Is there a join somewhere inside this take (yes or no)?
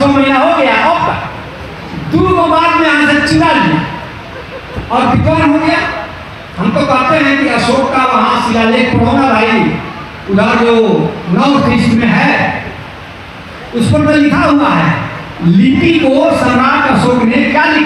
no